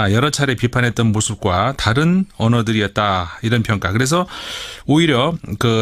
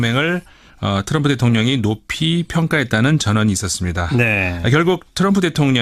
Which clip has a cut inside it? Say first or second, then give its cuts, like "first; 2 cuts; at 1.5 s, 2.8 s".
second; 1 cut; at 4.4 s